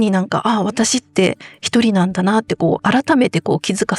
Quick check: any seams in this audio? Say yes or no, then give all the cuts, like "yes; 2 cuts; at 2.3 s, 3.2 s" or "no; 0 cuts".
yes; 1 cut; at 2.8 s